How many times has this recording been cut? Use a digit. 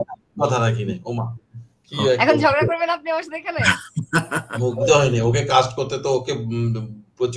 1